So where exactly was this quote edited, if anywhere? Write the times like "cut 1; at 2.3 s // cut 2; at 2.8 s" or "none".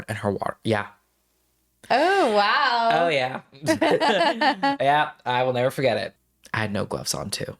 cut 1; at 6.1 s